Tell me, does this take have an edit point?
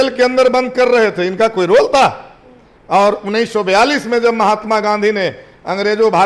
no; 0 cuts

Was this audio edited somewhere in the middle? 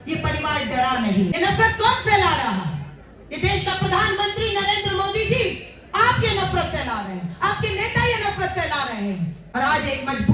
yes; 2 cuts; at 1.3 s, 9.4 s

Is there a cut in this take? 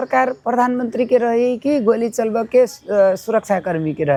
no; 0 cuts

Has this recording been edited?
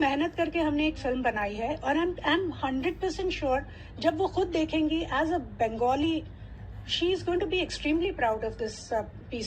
no; 0 cuts

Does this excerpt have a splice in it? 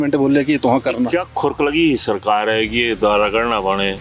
no; 0 cuts

